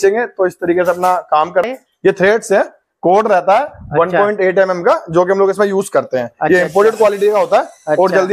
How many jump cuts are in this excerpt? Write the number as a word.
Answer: one